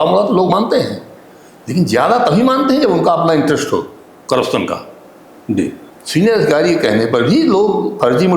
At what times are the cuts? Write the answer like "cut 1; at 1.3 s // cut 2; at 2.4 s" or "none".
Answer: cut 1; at 5.9 s